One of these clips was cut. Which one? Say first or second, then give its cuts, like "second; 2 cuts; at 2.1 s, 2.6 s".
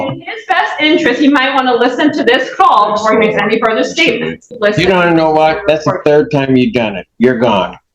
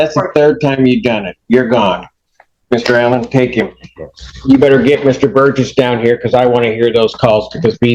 first; 1 cut; at 4.6 s